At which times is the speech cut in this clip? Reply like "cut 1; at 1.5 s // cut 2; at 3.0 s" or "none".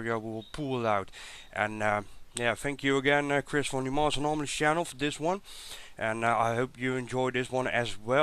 cut 1; at 1.1 s